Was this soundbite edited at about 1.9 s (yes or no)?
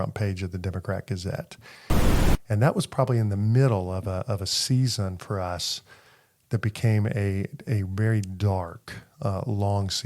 yes